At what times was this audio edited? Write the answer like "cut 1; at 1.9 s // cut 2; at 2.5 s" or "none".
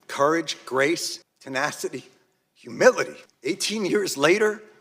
cut 1; at 3.2 s